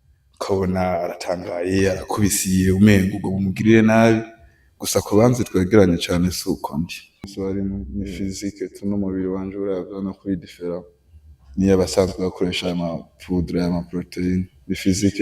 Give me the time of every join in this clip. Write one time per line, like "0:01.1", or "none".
0:07.3